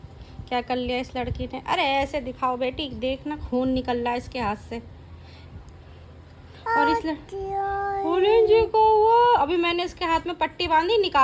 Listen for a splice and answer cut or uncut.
uncut